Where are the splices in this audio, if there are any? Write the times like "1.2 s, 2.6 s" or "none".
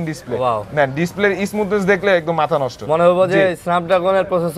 none